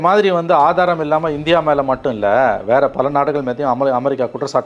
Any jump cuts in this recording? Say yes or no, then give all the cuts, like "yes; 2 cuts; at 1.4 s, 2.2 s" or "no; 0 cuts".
no; 0 cuts